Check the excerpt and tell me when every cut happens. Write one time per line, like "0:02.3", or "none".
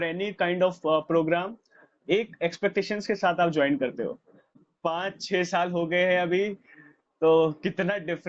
0:04.6